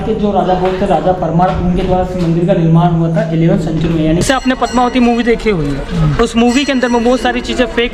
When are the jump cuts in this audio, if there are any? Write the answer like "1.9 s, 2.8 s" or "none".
4.2 s